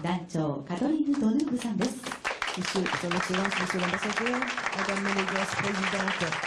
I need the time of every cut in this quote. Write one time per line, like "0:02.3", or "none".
0:02.2